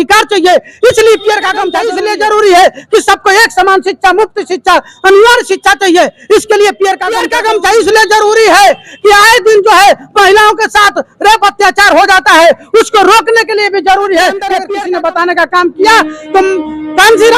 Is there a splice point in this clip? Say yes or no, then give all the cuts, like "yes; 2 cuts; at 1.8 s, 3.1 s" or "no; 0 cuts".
yes; 3 cuts; at 1.8 s, 7.3 s, 14.6 s